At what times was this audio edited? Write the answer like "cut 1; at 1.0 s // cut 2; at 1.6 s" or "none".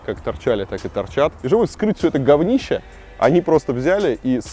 cut 1; at 1.4 s